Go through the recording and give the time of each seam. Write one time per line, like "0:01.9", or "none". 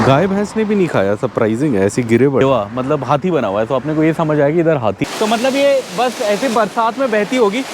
0:02.4
0:05.0